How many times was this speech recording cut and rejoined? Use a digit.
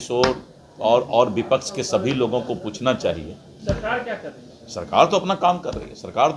0